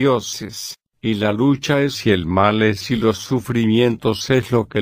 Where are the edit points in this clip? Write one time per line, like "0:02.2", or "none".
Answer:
0:01.0